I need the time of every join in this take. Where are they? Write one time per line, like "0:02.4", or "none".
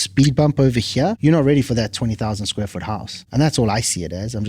0:01.2
0:03.2